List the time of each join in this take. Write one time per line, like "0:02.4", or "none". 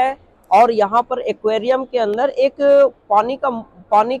none